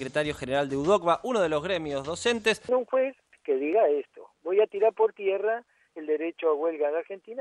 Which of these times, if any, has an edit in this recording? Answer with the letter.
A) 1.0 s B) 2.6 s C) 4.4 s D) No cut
D